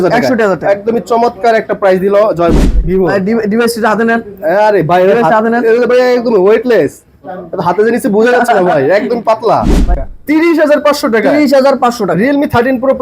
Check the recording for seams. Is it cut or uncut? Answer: cut